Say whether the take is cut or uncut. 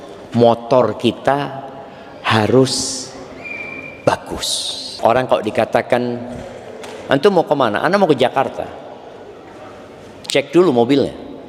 cut